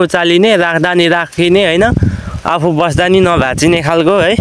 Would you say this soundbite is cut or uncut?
uncut